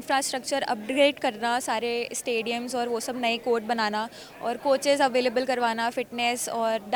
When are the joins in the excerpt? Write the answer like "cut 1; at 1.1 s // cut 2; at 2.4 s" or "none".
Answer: none

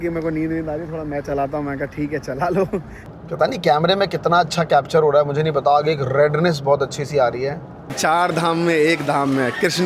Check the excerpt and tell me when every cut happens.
cut 1; at 3.0 s // cut 2; at 8.0 s

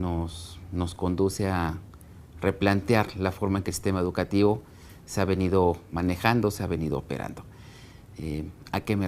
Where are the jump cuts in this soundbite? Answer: cut 1; at 2.2 s

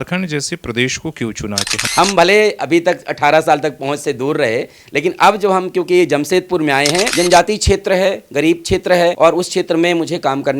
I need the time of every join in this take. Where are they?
cut 1; at 1.8 s // cut 2; at 7.1 s // cut 3; at 9.2 s

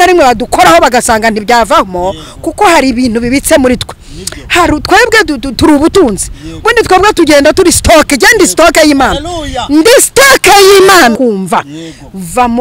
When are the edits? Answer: cut 1; at 11.2 s

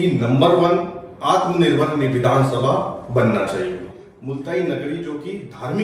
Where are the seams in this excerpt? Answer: cut 1; at 4.1 s

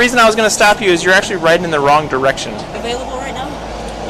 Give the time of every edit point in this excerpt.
cut 1; at 2.7 s

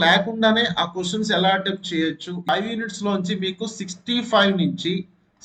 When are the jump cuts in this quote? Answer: cut 1; at 2.5 s

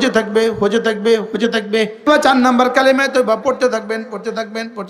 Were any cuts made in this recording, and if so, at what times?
cut 1; at 2.1 s

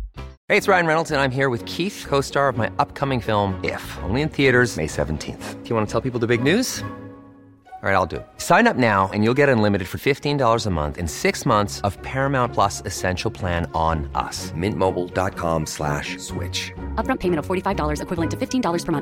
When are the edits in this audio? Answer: none

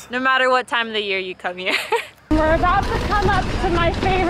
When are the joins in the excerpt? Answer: cut 1; at 2.1 s

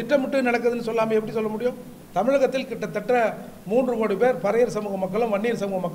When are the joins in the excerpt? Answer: cut 1; at 1.9 s

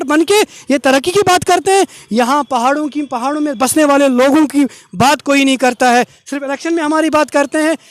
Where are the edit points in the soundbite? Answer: none

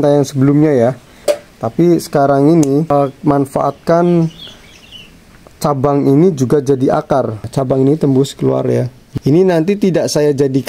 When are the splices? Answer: cut 1; at 1.1 s // cut 2; at 2.9 s // cut 3; at 7.5 s // cut 4; at 9.0 s

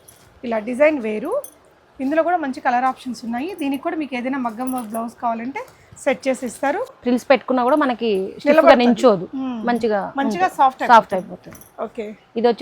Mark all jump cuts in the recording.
cut 1; at 6.9 s

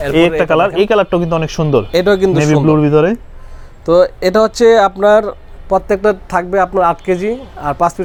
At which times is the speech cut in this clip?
none

